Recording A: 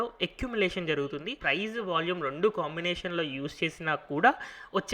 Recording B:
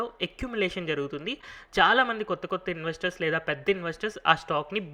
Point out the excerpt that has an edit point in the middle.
A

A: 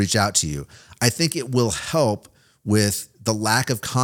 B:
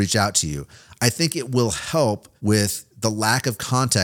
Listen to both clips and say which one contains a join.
B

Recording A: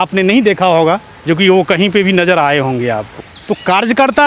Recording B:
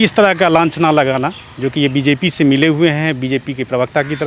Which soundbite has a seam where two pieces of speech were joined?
A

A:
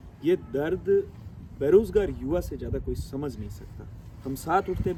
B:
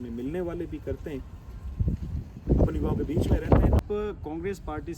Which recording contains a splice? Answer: B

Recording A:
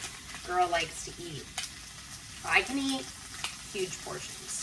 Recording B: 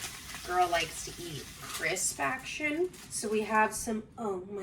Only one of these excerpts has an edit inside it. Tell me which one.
B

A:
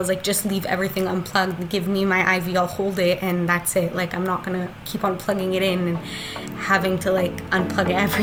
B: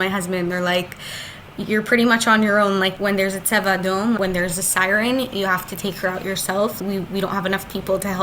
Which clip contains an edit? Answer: B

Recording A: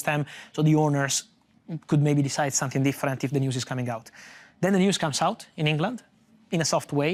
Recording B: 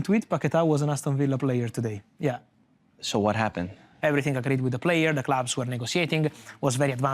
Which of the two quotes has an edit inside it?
B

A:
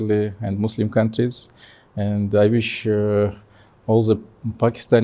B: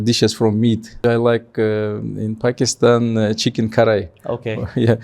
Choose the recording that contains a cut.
B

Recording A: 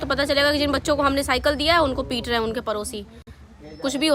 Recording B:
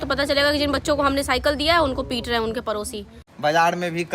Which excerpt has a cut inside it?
B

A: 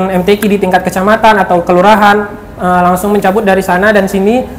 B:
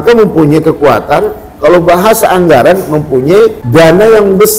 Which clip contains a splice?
B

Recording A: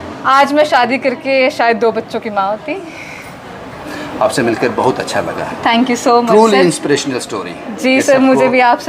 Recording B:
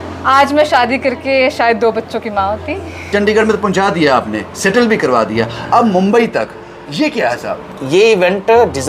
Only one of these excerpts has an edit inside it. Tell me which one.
B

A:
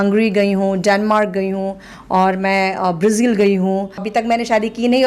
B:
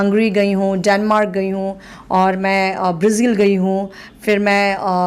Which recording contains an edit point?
A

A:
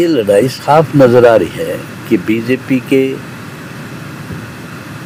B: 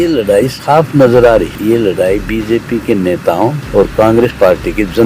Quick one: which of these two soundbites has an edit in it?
B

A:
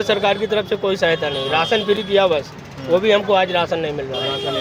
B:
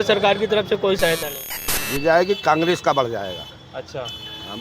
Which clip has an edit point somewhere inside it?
B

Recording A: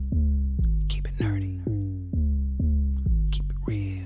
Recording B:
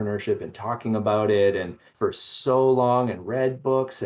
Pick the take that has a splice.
B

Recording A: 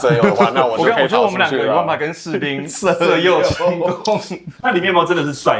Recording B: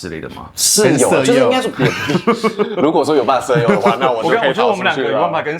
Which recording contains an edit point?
A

